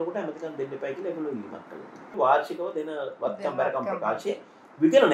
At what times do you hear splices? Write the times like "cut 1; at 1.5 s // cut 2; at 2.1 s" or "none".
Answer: cut 1; at 2.0 s